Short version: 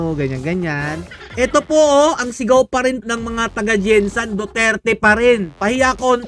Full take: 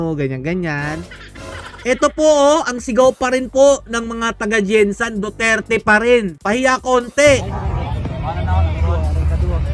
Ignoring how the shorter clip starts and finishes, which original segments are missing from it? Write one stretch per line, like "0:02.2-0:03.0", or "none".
0:01.1-0:01.6
0:03.5-0:03.8